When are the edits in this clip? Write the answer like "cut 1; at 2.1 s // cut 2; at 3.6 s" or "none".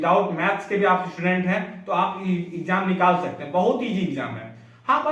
none